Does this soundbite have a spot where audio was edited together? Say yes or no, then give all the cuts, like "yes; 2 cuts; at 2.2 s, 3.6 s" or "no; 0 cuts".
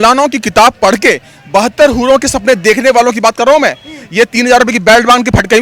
no; 0 cuts